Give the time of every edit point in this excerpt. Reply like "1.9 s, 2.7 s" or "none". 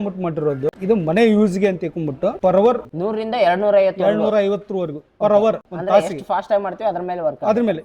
0.7 s, 2.9 s, 5.7 s